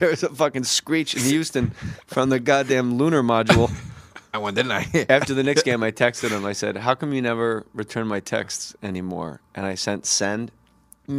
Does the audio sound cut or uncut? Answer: uncut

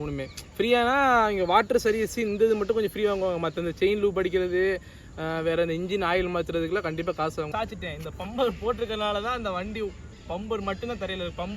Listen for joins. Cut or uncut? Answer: cut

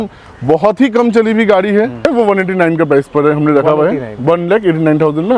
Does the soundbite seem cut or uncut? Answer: cut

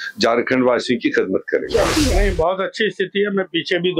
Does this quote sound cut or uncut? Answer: cut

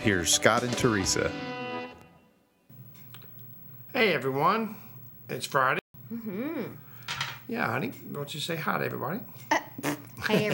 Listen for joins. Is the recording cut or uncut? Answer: cut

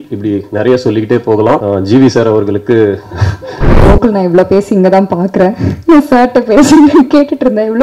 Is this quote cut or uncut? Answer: cut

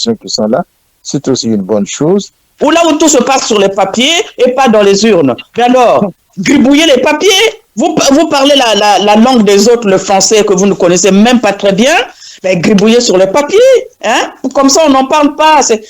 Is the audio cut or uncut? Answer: cut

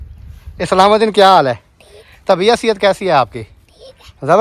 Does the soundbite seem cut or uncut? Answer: uncut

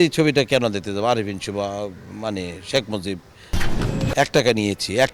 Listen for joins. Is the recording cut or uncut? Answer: cut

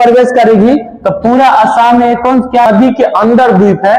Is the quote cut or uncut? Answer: cut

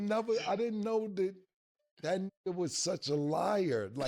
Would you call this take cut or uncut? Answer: uncut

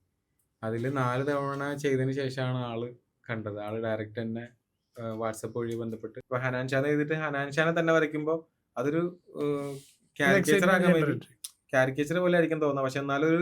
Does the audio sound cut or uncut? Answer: cut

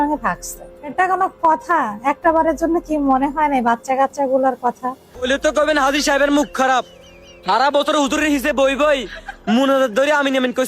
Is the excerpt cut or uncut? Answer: cut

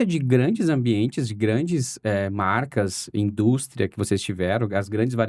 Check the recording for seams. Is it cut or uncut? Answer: uncut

